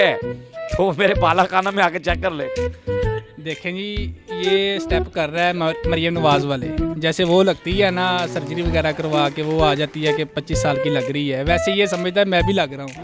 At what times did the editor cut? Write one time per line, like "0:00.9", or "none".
none